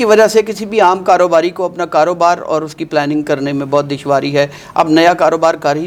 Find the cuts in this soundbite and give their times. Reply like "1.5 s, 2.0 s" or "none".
none